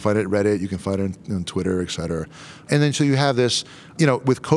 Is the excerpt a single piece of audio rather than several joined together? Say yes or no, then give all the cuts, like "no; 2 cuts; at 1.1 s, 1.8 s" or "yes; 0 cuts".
yes; 0 cuts